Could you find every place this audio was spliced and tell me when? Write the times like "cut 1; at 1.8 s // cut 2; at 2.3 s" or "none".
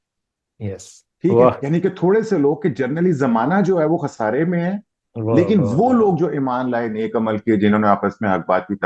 none